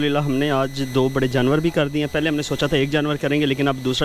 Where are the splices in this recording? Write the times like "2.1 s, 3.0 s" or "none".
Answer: none